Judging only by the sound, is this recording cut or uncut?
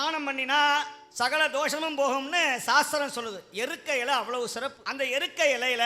cut